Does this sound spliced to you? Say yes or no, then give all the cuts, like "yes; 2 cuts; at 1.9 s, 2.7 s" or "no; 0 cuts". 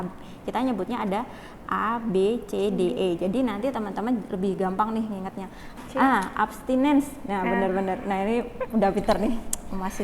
yes; 1 cut; at 5.8 s